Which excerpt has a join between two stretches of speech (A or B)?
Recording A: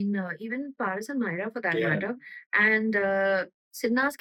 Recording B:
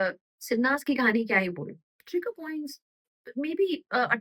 B